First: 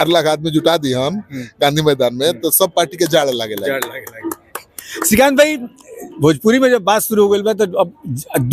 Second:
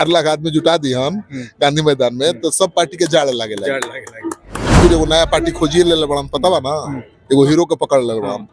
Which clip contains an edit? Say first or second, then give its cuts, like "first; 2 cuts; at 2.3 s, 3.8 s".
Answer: second; 1 cut; at 4.7 s